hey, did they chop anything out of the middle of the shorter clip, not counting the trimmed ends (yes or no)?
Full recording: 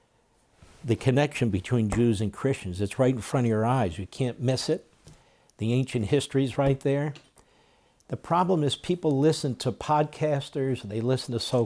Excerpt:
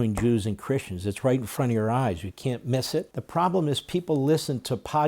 yes